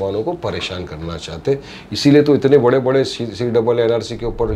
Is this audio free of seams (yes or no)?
yes